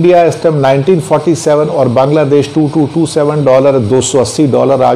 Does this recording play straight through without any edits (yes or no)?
yes